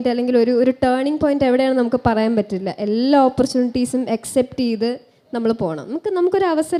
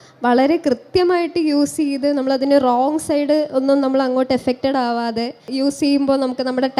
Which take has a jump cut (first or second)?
second